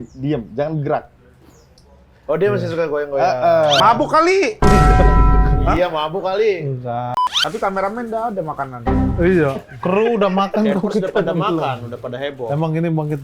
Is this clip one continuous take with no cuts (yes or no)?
no